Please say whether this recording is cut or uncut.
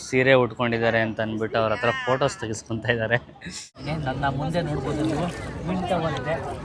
cut